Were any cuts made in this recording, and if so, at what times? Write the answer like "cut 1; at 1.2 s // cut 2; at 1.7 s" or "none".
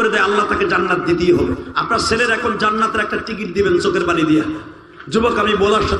cut 1; at 1.7 s